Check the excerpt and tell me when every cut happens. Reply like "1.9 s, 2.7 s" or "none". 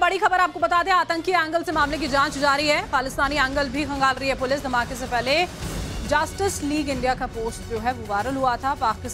4.7 s